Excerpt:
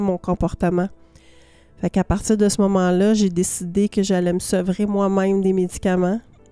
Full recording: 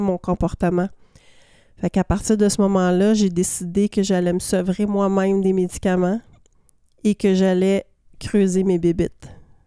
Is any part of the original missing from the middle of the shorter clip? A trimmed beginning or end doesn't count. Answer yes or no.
no